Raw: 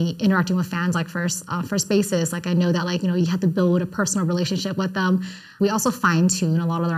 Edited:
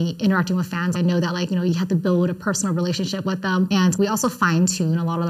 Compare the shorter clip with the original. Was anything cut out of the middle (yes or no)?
yes